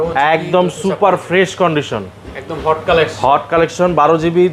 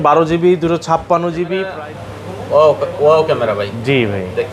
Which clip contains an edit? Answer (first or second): second